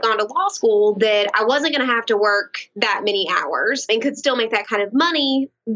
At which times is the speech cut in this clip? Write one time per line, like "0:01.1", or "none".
0:03.9